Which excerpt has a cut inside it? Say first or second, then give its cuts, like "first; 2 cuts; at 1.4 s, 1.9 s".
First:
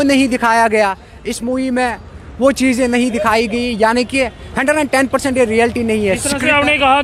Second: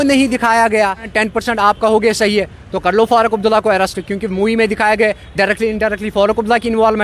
second; 1 cut; at 1.1 s